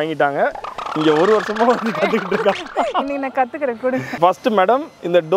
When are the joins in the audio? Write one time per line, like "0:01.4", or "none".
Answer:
0:04.1